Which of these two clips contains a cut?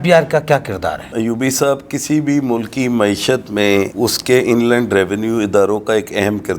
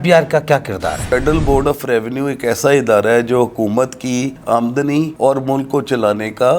second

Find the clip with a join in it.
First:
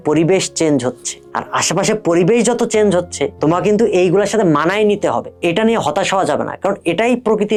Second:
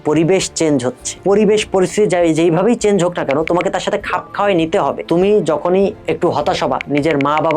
second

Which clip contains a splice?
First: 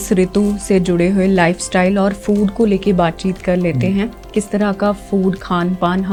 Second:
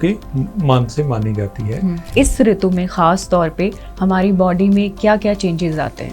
second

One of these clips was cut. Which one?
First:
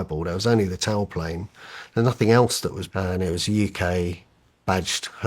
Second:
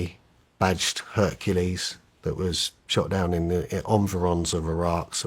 first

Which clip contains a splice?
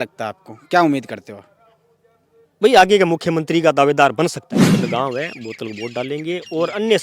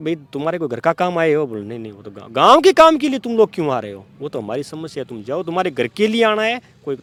first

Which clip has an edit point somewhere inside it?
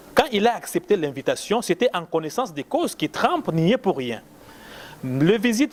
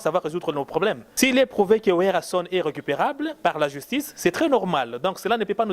second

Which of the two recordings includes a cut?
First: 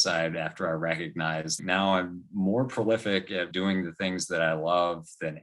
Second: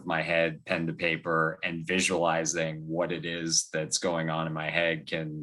first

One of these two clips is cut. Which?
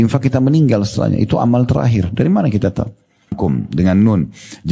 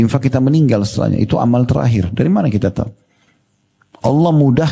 first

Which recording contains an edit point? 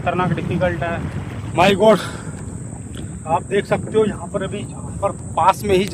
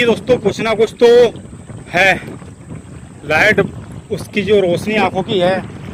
first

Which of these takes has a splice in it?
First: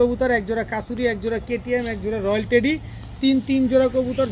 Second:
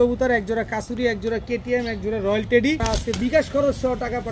second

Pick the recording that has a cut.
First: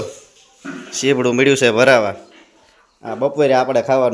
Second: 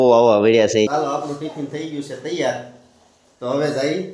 second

